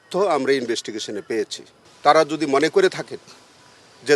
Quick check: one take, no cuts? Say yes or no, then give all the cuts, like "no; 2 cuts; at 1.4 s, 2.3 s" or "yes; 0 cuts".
no; 1 cut; at 1.9 s